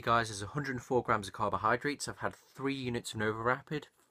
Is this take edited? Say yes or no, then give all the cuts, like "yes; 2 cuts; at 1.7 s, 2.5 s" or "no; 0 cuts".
no; 0 cuts